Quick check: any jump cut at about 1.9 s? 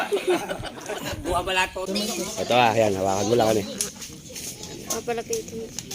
yes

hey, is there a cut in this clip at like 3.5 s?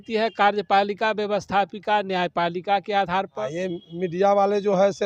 yes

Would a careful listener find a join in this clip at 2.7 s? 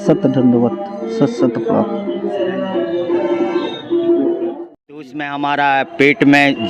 no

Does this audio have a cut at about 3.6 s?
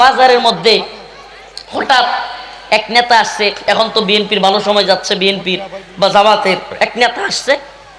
yes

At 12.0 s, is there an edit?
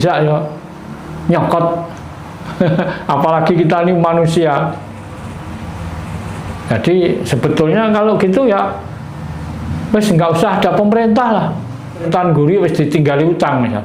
yes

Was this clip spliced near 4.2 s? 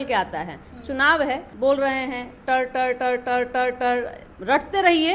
yes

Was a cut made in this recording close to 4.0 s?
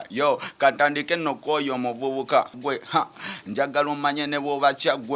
no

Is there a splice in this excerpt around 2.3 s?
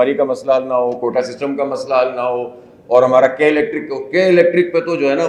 no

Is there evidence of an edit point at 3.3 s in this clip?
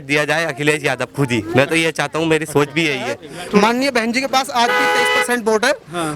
yes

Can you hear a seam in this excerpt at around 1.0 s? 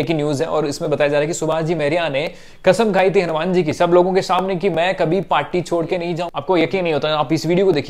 no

